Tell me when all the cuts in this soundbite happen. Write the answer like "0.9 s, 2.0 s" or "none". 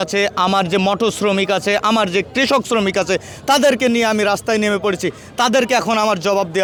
none